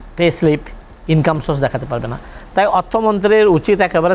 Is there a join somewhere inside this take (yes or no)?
no